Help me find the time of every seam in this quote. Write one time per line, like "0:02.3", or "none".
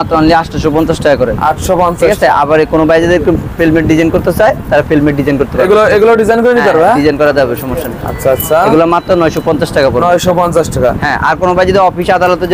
none